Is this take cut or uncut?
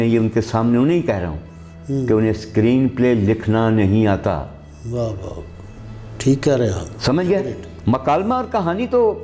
uncut